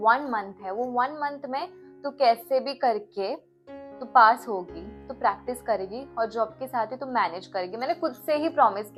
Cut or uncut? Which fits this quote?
uncut